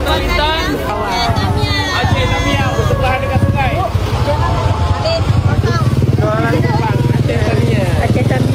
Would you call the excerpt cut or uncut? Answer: uncut